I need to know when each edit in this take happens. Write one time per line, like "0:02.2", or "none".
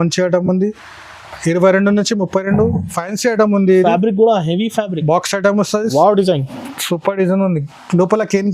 0:05.9